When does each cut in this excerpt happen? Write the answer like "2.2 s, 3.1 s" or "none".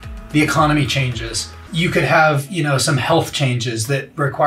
1.6 s

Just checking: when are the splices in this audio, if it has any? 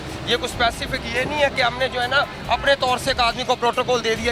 none

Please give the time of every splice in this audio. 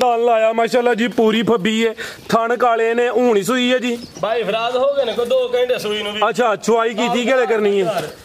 none

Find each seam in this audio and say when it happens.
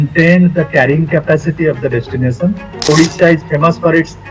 2.9 s

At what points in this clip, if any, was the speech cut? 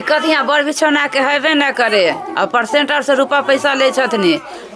none

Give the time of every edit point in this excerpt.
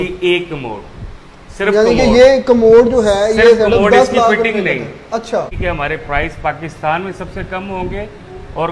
5.5 s

